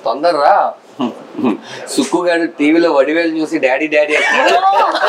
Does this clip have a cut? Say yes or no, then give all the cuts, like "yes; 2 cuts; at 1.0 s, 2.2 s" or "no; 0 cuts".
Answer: no; 0 cuts